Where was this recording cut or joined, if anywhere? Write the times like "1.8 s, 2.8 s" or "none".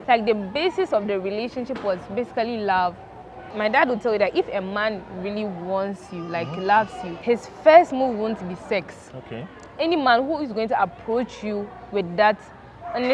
3.5 s